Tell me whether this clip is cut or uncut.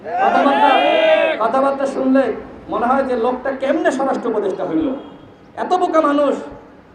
uncut